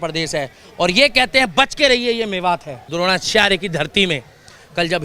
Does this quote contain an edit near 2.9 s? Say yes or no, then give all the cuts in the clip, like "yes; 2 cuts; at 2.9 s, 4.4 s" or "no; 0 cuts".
yes; 1 cut; at 2.9 s